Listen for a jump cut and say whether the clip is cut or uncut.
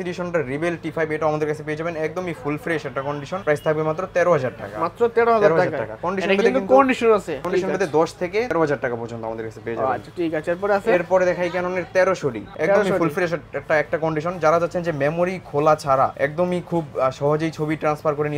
uncut